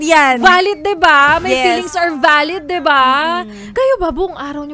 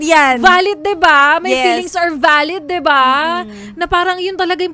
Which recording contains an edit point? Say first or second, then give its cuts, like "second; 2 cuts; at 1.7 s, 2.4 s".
first; 1 cut; at 3.7 s